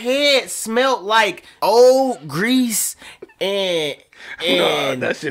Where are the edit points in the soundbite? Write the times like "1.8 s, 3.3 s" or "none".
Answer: 1.4 s